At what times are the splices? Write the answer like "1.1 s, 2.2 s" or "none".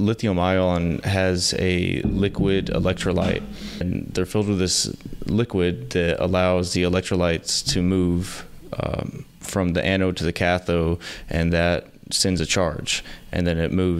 3.8 s